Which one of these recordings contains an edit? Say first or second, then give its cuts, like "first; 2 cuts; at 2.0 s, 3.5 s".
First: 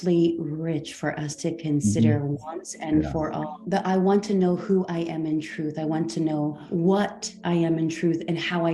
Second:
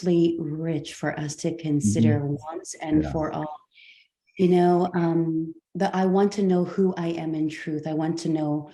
first; 2 cuts; at 3.5 s, 6.6 s